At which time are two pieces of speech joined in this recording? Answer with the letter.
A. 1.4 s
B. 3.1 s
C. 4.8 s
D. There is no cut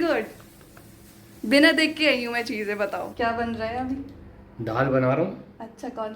B